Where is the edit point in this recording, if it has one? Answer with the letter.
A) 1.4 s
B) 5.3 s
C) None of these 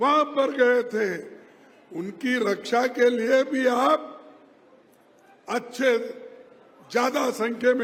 C